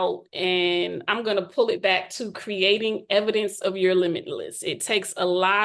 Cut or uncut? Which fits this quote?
uncut